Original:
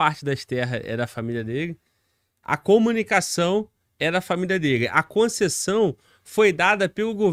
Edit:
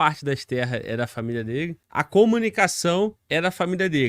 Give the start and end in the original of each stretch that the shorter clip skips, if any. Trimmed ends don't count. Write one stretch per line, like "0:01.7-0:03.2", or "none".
0:01.8-0:02.3
0:03.7-0:03.9

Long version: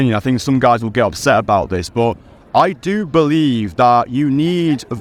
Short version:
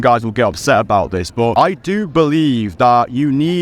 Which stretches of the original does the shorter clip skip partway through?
0:02.1-0:02.5

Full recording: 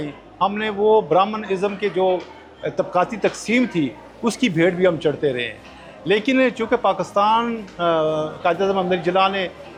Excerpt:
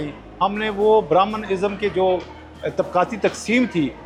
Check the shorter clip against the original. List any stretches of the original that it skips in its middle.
none

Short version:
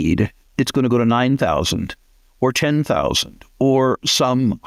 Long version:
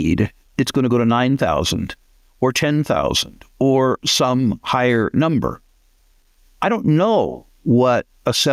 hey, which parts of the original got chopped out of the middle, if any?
none

